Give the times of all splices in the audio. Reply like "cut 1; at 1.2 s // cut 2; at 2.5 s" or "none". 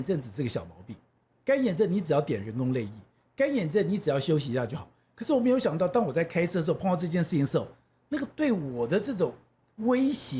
none